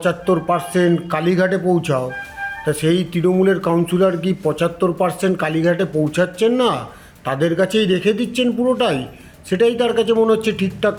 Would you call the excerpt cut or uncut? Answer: uncut